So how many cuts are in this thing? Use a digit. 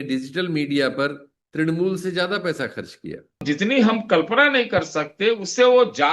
1